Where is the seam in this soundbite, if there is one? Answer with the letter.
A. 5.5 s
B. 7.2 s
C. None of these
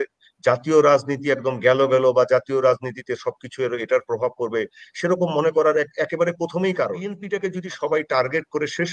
B